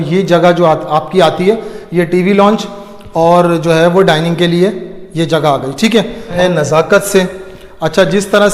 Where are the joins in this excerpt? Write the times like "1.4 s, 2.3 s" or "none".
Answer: 6.3 s